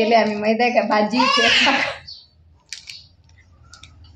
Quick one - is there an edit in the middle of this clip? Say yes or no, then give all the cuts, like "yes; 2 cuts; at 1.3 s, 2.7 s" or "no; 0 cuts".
no; 0 cuts